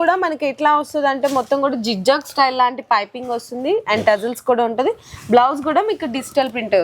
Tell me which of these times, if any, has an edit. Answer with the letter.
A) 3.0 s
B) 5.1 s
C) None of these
C